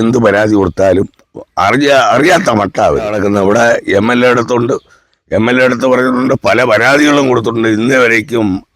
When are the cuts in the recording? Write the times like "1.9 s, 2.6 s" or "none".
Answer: 3.1 s